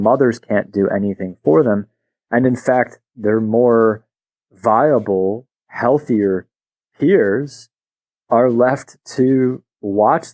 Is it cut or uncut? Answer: uncut